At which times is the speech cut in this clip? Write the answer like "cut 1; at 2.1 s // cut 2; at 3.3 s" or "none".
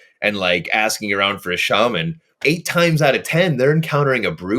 cut 1; at 2.3 s